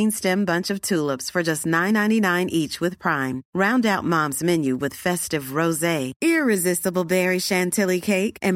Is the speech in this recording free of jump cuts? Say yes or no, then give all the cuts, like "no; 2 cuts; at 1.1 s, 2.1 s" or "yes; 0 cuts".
yes; 0 cuts